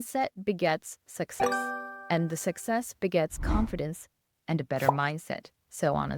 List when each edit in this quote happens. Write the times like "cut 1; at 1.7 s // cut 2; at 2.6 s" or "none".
none

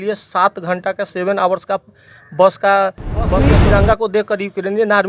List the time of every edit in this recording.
cut 1; at 3.5 s

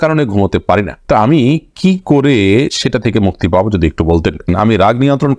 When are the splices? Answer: cut 1; at 4.5 s

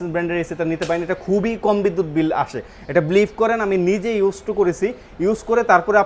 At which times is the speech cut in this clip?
none

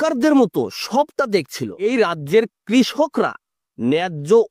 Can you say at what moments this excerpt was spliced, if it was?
cut 1; at 1.8 s

